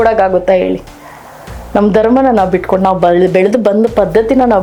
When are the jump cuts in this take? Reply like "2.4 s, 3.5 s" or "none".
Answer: none